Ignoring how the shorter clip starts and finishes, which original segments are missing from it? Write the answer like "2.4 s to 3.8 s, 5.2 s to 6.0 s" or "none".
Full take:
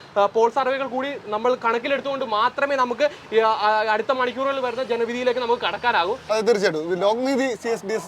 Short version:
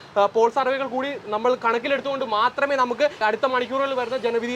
3.2 s to 3.9 s